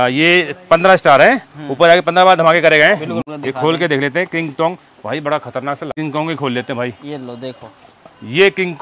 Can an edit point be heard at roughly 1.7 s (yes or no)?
no